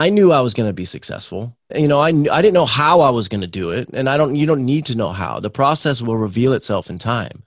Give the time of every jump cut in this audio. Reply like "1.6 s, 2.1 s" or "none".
1.7 s

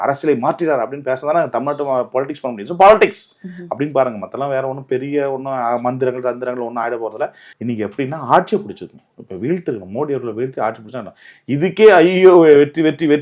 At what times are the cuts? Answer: 7.4 s

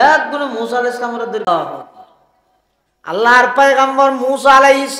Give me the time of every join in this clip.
1.5 s

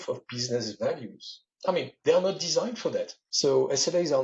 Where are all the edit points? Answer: none

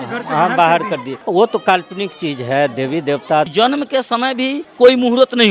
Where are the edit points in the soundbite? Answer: 1.1 s, 3.5 s, 4.6 s

